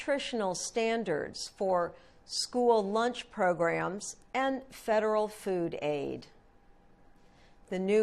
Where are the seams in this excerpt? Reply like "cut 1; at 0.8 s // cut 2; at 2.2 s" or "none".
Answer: none